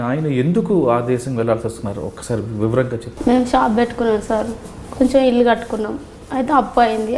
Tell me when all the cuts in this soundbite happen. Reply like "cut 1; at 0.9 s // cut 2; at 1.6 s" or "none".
cut 1; at 3.1 s